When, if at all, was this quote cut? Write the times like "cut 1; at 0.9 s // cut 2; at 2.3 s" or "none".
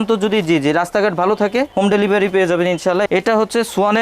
cut 1; at 3.0 s